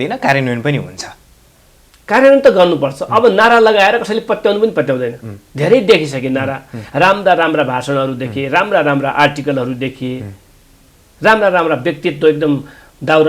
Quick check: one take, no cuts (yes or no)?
yes